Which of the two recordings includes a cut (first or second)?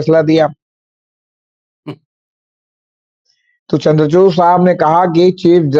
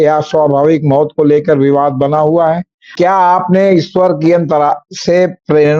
second